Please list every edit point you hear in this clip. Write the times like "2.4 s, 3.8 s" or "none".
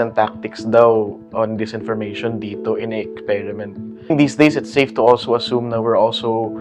4.1 s